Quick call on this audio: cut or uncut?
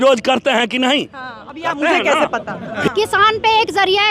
cut